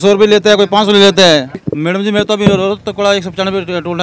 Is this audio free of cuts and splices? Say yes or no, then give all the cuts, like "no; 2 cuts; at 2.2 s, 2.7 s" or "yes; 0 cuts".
no; 1 cut; at 1.7 s